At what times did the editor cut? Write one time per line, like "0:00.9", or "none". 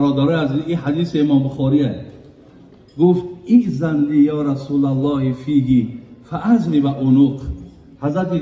none

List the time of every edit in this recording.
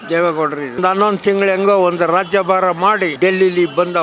0:00.8
0:03.1

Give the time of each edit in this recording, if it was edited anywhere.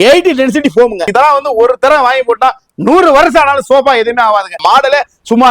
0:01.1
0:04.6

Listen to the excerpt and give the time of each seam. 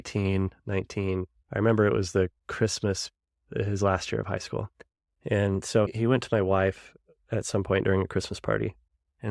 none

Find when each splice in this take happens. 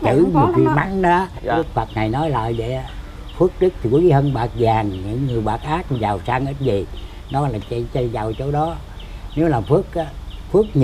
0:01.5

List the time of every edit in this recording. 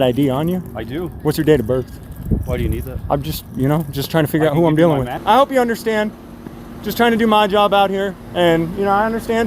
0:05.1
0:08.2

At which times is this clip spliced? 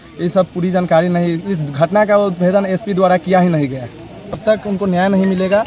0:04.4

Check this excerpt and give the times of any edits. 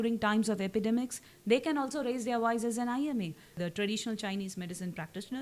0:03.6

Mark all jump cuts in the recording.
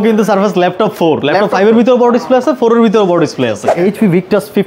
0:03.7

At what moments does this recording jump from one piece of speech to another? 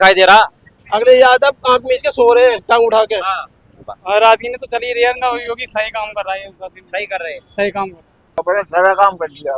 0:04.0
0:08.2

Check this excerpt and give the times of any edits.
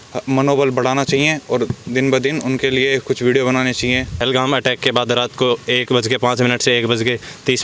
0:04.2

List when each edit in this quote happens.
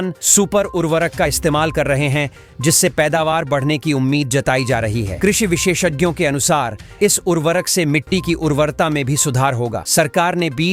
none

